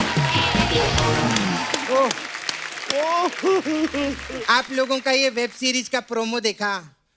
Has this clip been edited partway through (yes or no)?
yes